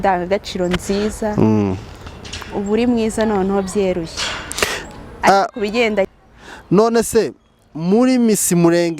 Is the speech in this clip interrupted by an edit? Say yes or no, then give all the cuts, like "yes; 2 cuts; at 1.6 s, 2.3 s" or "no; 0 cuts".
yes; 1 cut; at 6.1 s